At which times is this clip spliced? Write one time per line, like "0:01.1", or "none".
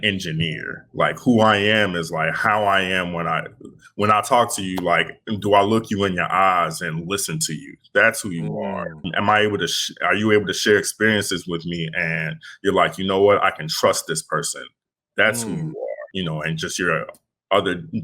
0:09.1
0:16.1